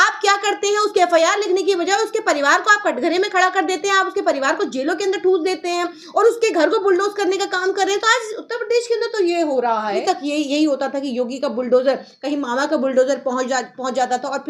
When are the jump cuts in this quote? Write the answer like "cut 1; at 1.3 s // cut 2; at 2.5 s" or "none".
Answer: cut 1; at 10.0 s

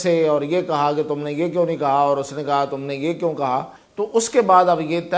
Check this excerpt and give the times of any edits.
cut 1; at 3.8 s

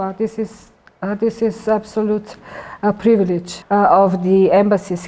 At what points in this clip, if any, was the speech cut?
cut 1; at 3.5 s

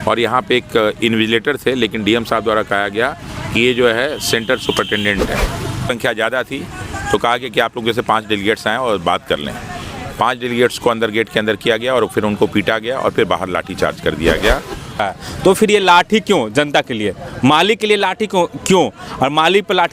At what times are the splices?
cut 1; at 5.9 s // cut 2; at 15.0 s

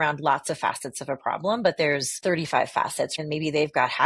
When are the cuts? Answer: cut 1; at 3.2 s

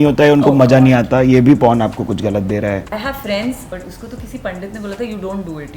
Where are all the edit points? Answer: cut 1; at 2.9 s // cut 2; at 3.7 s

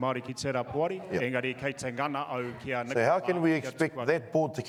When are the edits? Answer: none

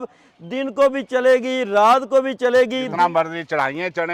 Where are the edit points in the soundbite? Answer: cut 1; at 2.9 s

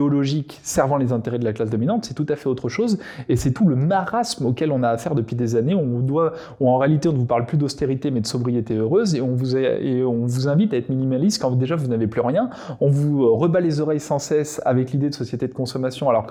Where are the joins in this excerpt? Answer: none

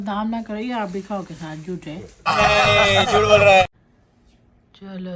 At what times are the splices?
cut 1; at 3.7 s

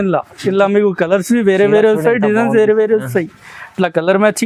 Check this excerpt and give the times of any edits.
none

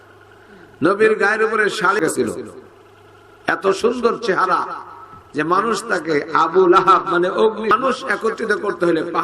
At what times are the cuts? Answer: cut 1; at 2.0 s // cut 2; at 7.7 s

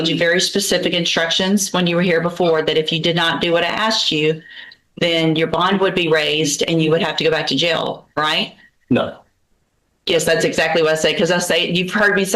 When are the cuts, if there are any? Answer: none

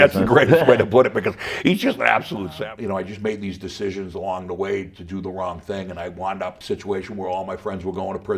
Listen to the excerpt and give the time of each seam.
cut 1; at 2.4 s // cut 2; at 6.6 s

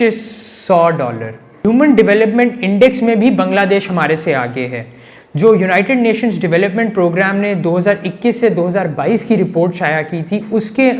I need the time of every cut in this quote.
cut 1; at 1.6 s

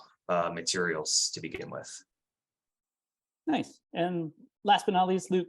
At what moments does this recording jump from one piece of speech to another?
none

